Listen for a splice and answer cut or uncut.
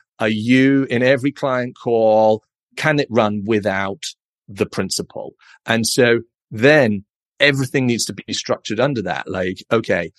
uncut